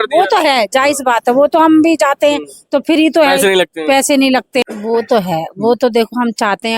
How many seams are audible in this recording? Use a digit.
1